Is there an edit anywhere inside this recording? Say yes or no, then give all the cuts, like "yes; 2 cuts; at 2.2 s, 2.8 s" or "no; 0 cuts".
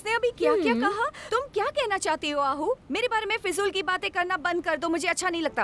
no; 0 cuts